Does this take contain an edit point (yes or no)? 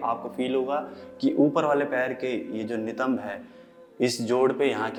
no